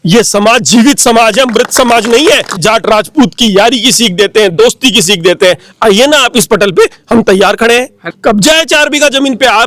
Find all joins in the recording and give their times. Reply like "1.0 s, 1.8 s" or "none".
2.6 s, 8.0 s

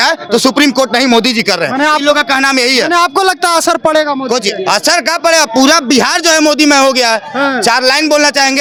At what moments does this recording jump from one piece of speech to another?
none

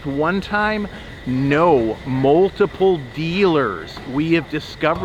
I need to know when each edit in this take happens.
none

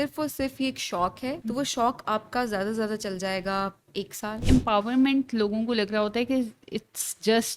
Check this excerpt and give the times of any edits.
1.4 s, 4.4 s

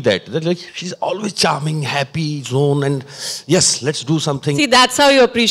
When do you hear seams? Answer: none

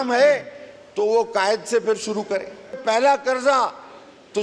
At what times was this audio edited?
2.8 s

